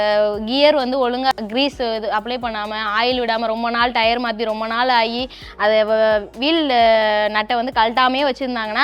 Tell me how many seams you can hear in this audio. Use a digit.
1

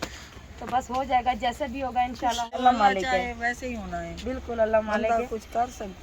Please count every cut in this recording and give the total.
1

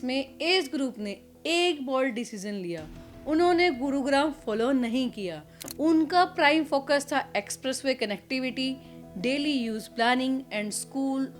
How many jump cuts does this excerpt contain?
1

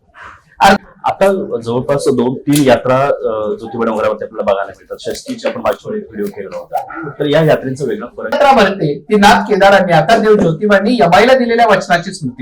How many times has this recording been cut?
2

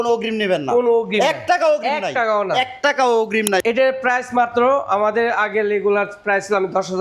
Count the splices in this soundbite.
1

